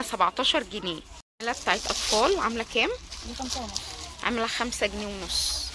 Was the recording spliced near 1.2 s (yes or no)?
yes